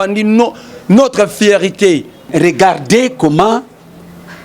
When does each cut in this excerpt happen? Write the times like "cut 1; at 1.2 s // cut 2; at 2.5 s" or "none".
cut 1; at 2.3 s